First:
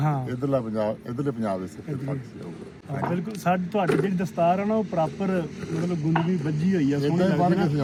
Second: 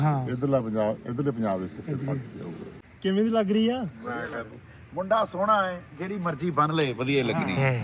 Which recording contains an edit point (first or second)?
second